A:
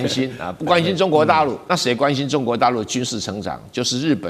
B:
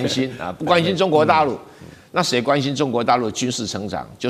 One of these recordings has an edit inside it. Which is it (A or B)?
A